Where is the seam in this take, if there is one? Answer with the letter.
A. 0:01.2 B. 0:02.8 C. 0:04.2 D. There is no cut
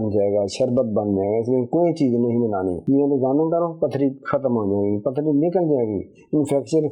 B